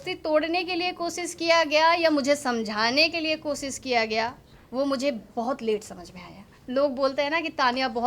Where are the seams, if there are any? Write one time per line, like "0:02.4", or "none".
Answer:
0:06.5